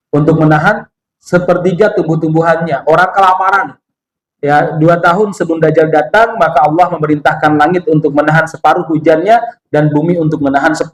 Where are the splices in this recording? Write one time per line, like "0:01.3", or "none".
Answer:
none